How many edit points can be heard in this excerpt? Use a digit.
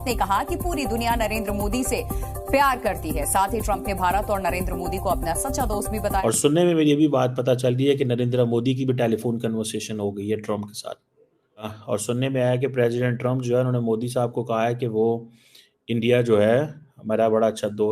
2